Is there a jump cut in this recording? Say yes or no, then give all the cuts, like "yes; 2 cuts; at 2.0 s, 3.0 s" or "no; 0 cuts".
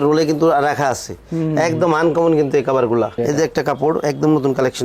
yes; 1 cut; at 3.2 s